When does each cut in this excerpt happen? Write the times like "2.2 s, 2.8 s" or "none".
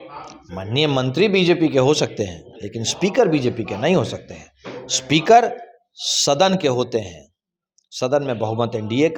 none